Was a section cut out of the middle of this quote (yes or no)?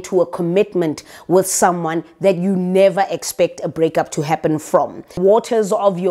yes